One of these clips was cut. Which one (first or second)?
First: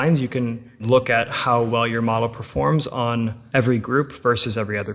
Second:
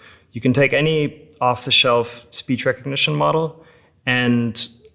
first